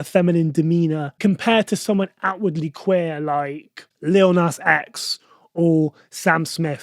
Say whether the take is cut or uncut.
cut